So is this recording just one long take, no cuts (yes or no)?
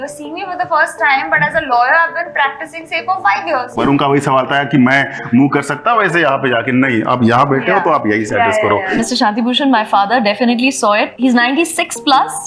no